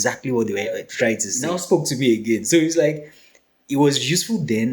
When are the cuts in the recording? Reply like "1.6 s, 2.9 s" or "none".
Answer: 1.5 s